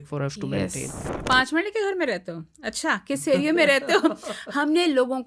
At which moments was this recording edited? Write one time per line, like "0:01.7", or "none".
0:01.0